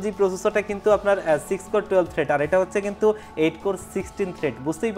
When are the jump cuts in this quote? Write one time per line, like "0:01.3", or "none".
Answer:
none